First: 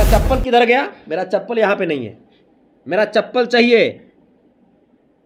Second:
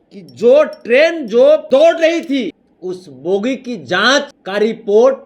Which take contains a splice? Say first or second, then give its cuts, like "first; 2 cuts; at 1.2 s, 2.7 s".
second; 3 cuts; at 1.6 s, 2.7 s, 4.4 s